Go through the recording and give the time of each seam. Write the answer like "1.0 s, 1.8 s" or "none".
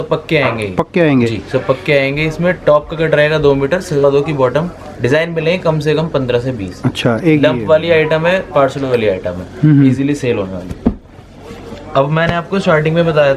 none